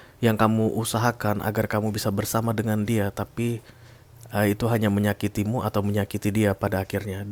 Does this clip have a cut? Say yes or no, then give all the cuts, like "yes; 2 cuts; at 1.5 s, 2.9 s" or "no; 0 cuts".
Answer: no; 0 cuts